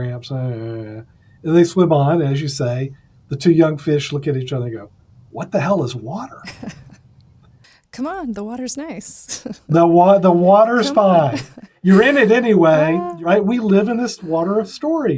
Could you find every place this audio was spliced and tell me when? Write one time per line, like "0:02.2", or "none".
0:07.4
0:11.7
0:13.1
0:14.2